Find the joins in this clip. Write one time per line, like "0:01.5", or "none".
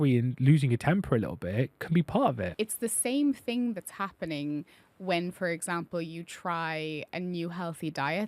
0:02.5